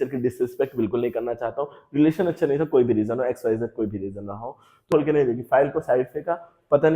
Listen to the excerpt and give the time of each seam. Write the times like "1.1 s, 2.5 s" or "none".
4.9 s